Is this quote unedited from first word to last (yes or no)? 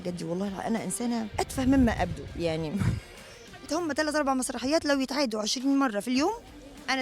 no